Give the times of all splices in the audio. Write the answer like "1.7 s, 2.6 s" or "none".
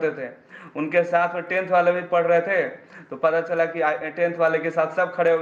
none

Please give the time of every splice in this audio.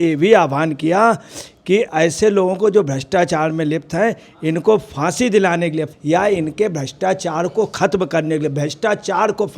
1.9 s, 5.9 s

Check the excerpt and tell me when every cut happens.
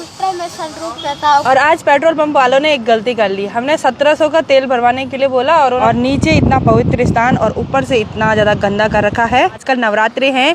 1.4 s, 5.8 s, 9.5 s

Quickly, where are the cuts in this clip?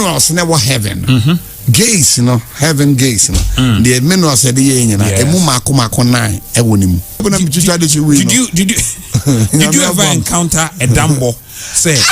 7.2 s

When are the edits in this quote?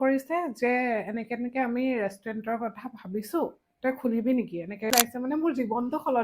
4.9 s

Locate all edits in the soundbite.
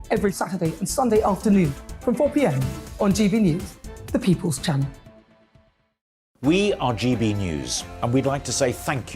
6.2 s

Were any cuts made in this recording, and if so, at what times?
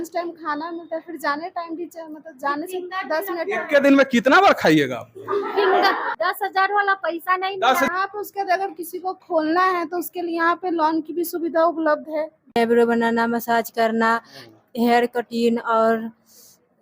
6.1 s, 7.9 s, 12.6 s

